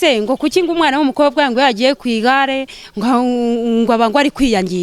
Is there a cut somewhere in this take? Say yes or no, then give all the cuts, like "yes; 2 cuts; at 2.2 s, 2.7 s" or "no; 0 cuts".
no; 0 cuts